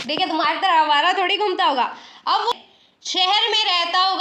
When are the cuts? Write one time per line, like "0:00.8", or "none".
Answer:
0:02.5